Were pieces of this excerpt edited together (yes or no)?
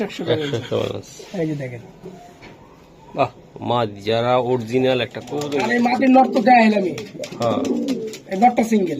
yes